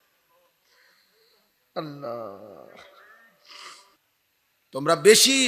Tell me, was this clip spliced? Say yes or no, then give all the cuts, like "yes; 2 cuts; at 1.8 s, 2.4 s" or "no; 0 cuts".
yes; 1 cut; at 4.0 s